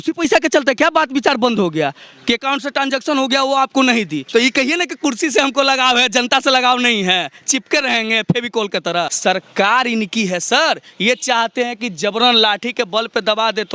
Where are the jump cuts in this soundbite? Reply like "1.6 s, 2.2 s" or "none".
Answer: 4.2 s, 9.1 s